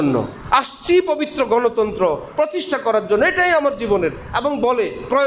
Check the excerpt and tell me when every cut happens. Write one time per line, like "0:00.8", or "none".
none